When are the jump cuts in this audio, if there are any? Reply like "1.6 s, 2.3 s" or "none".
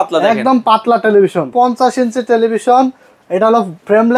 1.5 s